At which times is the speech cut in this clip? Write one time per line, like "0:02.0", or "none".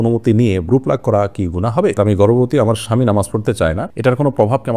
0:02.0